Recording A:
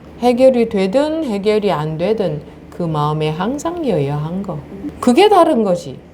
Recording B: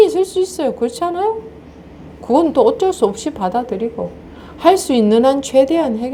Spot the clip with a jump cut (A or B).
A